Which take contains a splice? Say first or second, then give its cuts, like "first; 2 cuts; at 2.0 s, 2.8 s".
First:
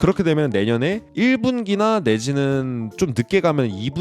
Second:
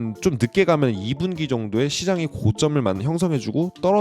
first; 1 cut; at 1.0 s